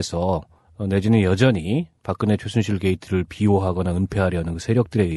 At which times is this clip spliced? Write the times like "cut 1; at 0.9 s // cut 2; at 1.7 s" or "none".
none